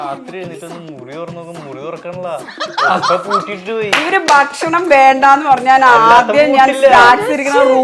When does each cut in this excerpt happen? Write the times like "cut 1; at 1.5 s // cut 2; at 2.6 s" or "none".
none